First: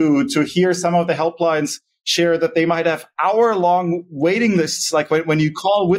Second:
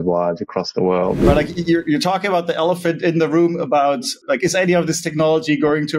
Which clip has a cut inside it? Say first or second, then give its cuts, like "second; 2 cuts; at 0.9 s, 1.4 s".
second; 1 cut; at 1.2 s